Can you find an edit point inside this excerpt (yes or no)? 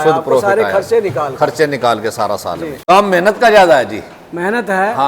yes